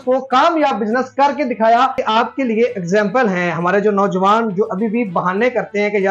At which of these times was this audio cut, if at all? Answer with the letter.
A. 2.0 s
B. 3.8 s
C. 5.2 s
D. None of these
A